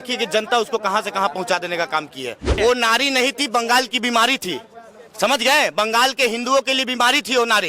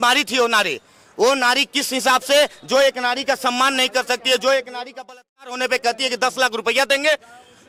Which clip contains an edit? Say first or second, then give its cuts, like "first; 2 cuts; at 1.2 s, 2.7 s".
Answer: first; 1 cut; at 2.5 s